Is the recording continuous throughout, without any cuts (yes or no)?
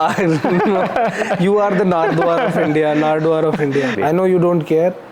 no